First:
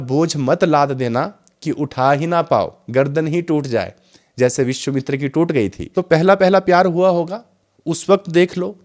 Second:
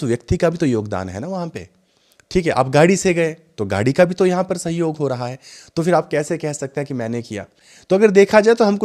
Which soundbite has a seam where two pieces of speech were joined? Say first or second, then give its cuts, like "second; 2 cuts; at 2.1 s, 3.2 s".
first; 1 cut; at 5.8 s